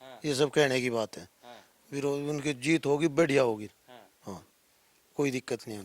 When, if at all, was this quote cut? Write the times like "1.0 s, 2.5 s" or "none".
none

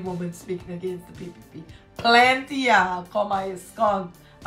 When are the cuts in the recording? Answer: none

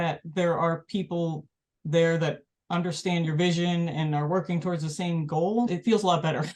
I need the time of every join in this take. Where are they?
none

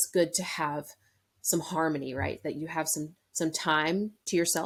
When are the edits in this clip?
none

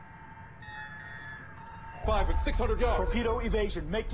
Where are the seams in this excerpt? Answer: 2.0 s

